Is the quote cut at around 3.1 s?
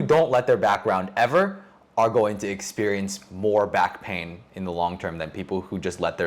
no; 0 cuts

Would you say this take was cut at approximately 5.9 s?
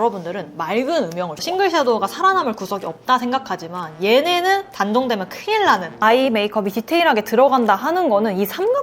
yes; 2 cuts; at 1.4 s, 5.9 s

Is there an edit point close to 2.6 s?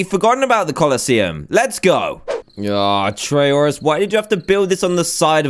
yes; 1 cut; at 2.6 s

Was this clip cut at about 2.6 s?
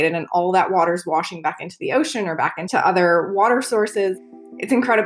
yes; 2 cuts; at 2.6 s, 4.2 s

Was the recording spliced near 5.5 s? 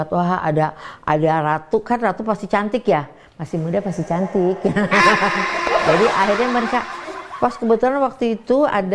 no; 0 cuts

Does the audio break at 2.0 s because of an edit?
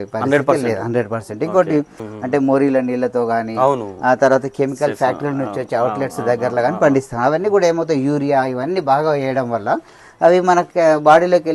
yes; 1 cut; at 2.0 s

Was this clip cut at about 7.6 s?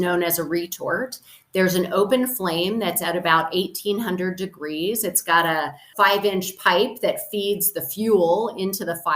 no; 1 cut; at 5.9 s

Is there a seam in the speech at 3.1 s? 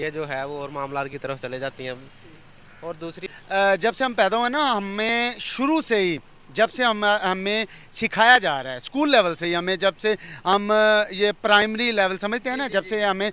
yes; 1 cut; at 3.1 s

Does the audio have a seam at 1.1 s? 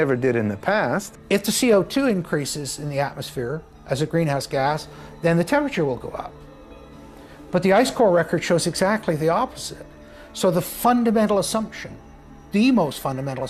yes; 1 cut; at 1.1 s

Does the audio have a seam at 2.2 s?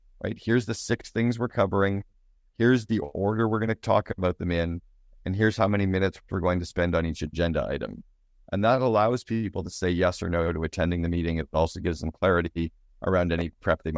no; 0 cuts

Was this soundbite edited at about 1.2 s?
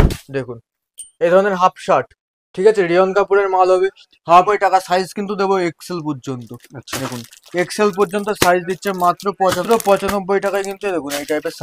no; 2 cuts; at 4.3 s, 9.6 s

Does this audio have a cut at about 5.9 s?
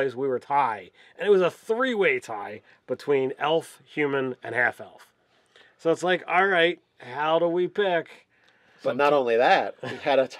yes; 1 cut; at 5.9 s

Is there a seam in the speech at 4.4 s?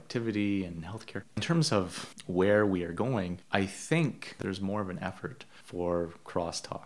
yes; 2 cuts; at 1.4 s, 4.4 s

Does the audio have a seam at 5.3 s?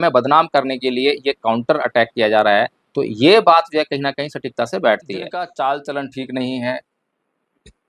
yes; 1 cut; at 5.3 s

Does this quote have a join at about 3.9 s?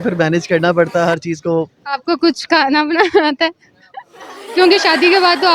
no; 1 cut; at 1.8 s

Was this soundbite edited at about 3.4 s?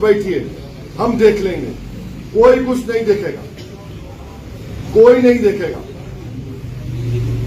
no; 0 cuts

